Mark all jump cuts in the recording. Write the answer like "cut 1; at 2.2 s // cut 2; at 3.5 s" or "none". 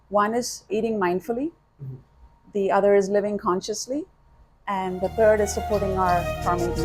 none